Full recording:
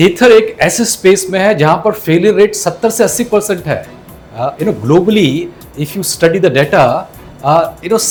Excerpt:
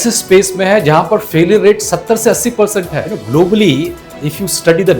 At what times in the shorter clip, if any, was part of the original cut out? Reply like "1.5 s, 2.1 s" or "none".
3.1 s